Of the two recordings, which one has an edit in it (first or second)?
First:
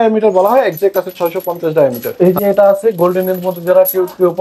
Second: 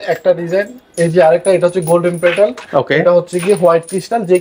first